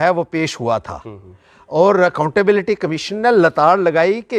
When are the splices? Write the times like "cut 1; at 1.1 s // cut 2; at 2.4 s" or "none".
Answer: none